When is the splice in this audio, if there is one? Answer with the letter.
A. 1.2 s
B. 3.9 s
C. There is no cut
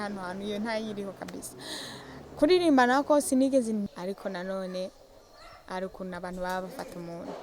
B